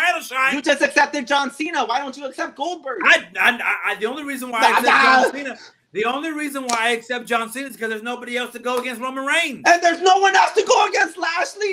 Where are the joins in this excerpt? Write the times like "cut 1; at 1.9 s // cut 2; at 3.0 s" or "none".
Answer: none